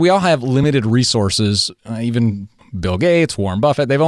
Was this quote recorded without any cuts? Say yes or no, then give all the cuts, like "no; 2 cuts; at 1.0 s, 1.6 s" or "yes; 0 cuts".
no; 1 cut; at 2.6 s